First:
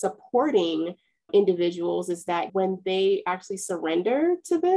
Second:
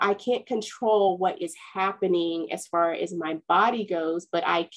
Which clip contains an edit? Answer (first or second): first